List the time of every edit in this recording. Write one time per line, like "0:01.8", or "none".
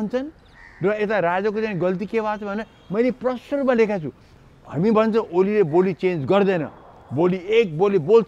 0:04.3